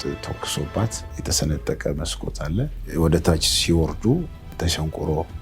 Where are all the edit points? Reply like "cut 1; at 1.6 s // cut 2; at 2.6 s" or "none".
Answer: cut 1; at 1.1 s // cut 2; at 2.8 s // cut 3; at 4.5 s

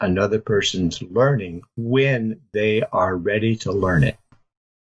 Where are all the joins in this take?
none

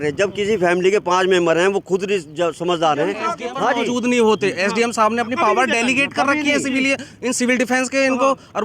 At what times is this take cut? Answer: cut 1; at 3.4 s

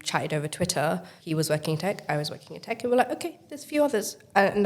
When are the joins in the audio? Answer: cut 1; at 1.1 s

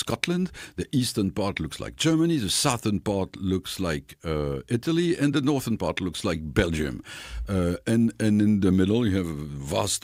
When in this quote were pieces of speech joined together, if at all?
none

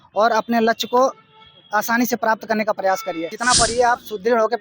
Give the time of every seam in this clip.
cut 1; at 3.3 s

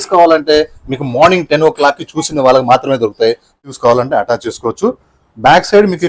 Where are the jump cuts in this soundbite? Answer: cut 1; at 3.6 s

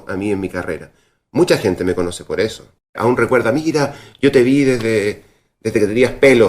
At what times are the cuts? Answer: cut 1; at 3.0 s

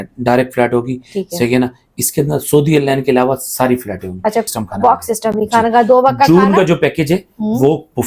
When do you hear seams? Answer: cut 1; at 4.4 s

